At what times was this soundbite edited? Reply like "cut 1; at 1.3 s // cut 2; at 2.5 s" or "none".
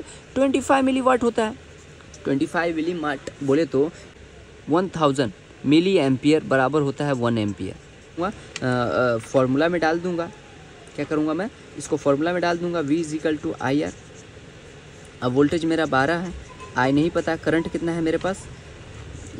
cut 1; at 4.1 s // cut 2; at 8.2 s